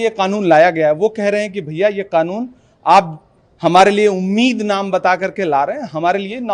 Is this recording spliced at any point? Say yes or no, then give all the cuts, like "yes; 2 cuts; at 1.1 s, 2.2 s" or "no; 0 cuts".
no; 0 cuts